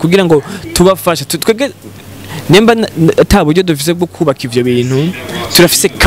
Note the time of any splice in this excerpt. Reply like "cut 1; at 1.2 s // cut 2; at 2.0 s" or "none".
none